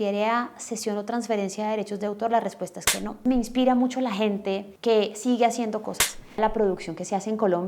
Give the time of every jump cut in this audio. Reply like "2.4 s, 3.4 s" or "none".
3.2 s, 6.4 s